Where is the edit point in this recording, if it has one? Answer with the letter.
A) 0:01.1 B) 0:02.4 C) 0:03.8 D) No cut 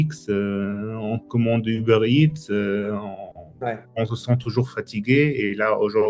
C